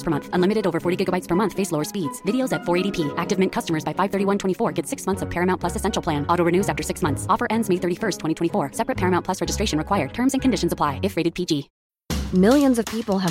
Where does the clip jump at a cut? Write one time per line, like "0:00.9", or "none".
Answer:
0:11.8